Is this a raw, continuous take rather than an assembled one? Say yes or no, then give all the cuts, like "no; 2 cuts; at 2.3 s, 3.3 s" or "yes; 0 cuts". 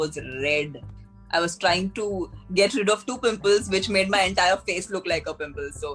yes; 0 cuts